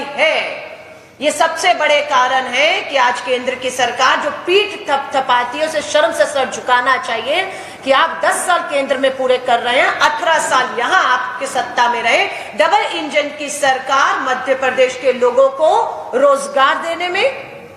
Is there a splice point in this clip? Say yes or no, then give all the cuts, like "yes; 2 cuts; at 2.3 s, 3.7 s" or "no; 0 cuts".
no; 0 cuts